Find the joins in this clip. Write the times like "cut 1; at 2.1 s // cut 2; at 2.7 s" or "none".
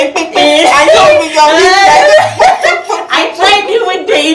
none